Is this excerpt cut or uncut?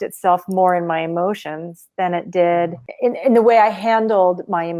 uncut